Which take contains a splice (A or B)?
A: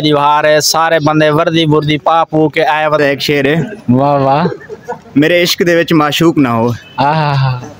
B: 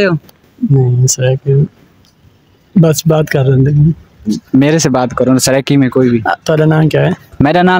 A